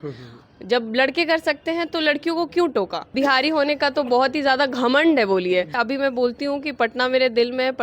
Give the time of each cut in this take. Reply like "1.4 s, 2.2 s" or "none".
3.1 s, 5.7 s